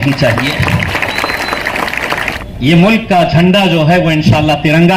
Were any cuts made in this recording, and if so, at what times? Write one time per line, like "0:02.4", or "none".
0:02.3